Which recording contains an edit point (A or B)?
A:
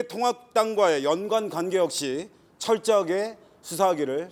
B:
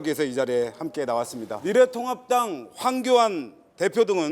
B